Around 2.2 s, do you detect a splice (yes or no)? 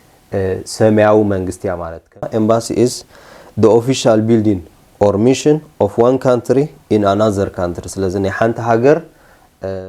yes